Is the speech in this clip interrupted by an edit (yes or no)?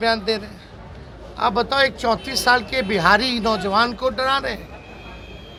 no